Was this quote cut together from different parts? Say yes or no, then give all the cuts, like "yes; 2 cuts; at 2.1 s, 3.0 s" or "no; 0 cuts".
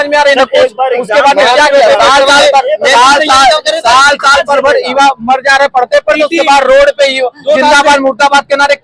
no; 0 cuts